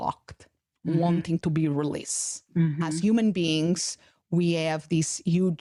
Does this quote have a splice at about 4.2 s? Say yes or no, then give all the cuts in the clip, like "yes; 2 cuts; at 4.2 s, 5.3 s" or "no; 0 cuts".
no; 0 cuts